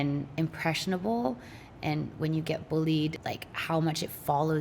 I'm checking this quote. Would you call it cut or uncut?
cut